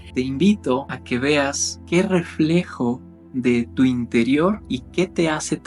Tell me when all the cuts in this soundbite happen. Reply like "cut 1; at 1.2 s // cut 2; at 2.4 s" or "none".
cut 1; at 0.9 s // cut 2; at 1.7 s // cut 3; at 4.6 s